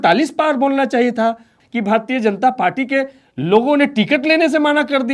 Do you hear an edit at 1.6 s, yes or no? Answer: yes